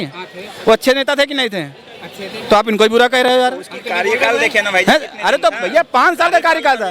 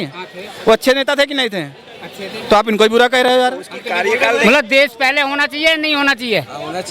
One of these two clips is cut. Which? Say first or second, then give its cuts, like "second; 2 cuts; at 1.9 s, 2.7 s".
second; 1 cut; at 4.4 s